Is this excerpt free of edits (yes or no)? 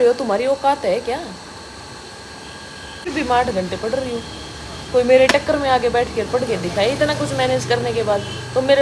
no